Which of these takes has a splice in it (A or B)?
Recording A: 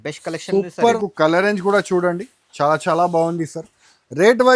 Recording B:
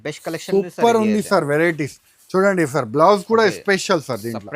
A